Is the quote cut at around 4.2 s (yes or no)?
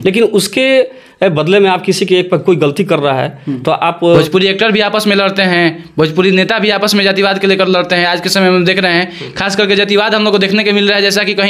yes